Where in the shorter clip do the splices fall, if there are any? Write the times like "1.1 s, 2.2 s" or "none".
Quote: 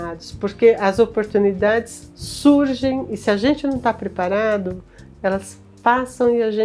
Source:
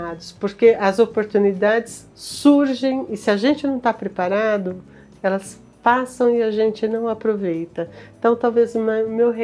none